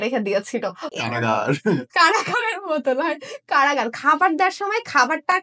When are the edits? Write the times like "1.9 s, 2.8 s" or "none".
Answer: 1.0 s